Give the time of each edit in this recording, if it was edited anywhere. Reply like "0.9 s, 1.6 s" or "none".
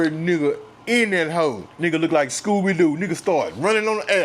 1.7 s